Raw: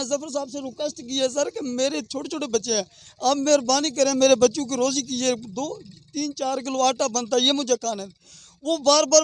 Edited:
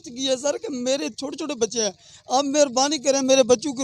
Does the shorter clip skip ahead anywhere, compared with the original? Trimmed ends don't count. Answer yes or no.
no